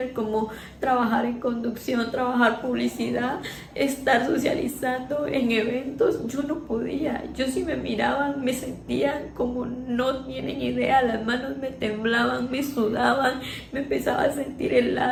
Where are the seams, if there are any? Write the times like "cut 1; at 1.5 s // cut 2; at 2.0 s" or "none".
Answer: none